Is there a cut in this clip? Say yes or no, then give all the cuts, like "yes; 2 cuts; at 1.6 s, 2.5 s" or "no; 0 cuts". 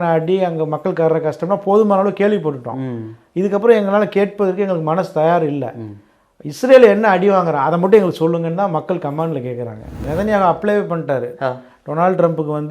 yes; 1 cut; at 10.0 s